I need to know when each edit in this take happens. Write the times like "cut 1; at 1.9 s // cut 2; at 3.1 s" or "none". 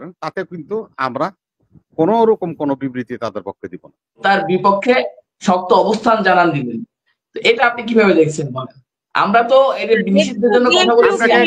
cut 1; at 4.2 s